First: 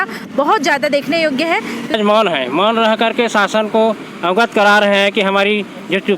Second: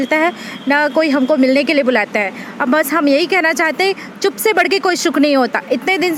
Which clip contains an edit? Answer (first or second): first